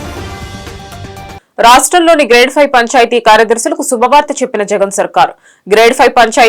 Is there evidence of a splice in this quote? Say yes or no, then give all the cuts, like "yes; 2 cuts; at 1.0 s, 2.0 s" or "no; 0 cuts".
no; 0 cuts